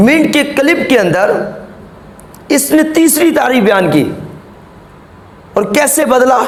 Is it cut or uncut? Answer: uncut